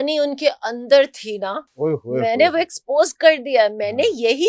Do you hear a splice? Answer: no; 0 cuts

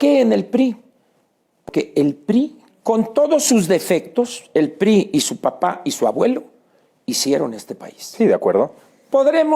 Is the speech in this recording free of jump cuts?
no; 1 cut; at 1.6 s

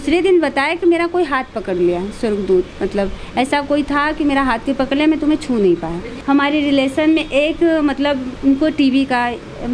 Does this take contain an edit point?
yes; 1 cut; at 6.1 s

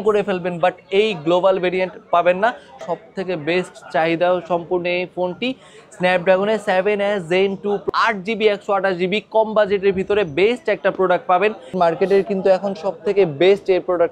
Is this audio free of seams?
no; 3 cuts; at 2.7 s, 7.8 s, 11.7 s

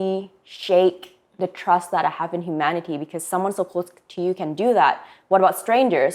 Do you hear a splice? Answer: no; 0 cuts

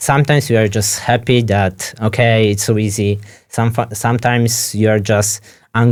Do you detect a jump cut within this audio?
no; 0 cuts

